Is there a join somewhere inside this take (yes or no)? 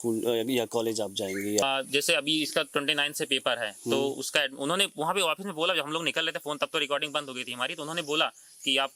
no